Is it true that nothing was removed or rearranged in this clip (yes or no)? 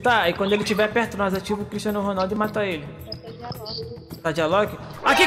yes